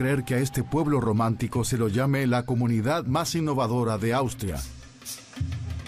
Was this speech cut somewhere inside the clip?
yes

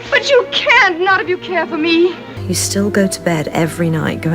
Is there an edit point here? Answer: yes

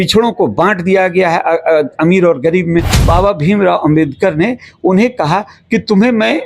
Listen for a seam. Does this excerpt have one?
yes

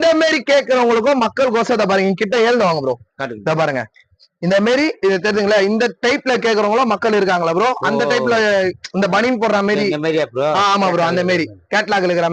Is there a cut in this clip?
no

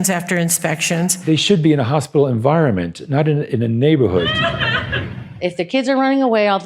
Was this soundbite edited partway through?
yes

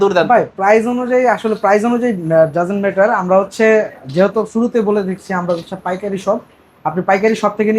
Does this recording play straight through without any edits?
yes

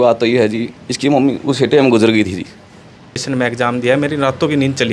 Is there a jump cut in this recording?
yes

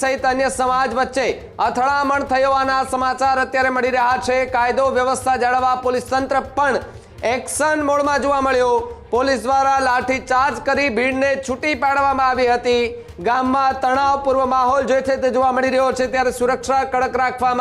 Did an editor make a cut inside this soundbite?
no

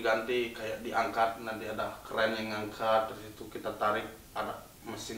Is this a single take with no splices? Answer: yes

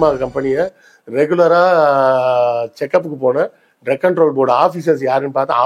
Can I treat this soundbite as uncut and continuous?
yes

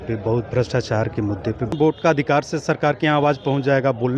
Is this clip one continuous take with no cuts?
no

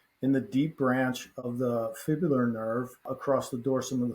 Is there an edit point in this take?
yes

